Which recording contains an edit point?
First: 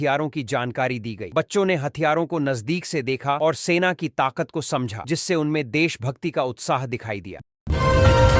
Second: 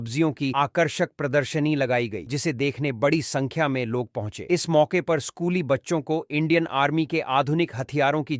first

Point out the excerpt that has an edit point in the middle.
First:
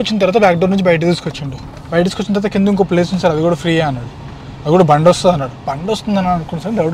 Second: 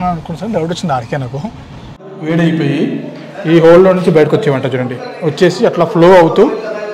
second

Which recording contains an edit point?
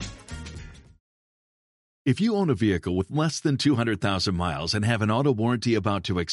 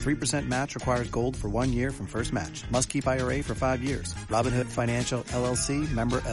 first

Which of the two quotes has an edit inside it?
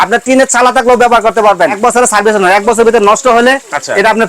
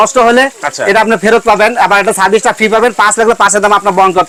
first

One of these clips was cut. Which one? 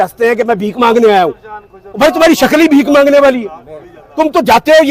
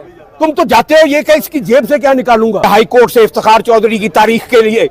second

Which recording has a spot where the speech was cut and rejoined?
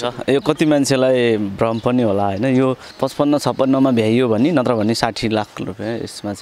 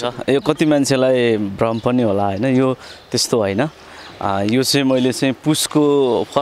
first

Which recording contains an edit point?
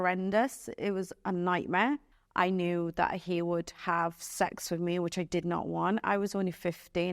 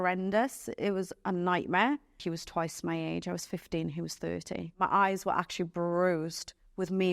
second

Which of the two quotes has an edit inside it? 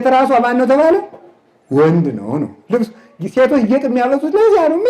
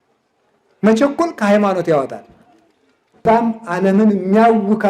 second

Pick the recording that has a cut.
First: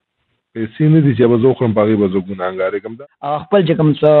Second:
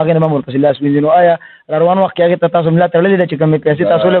first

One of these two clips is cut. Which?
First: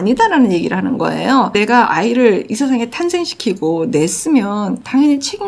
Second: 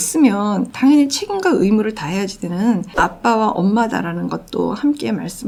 first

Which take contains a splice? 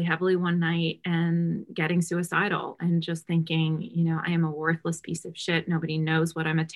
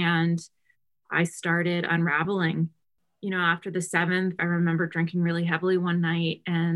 second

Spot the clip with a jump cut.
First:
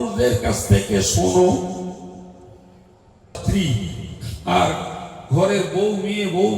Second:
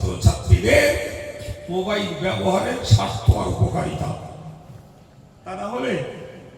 first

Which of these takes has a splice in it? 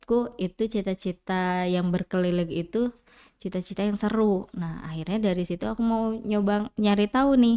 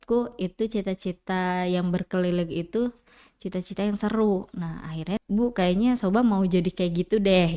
second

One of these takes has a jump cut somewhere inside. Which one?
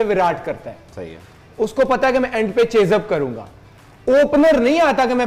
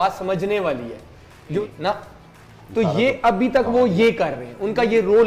second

